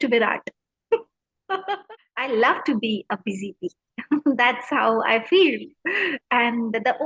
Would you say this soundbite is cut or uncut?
cut